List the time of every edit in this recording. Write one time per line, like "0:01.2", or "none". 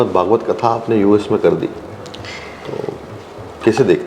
none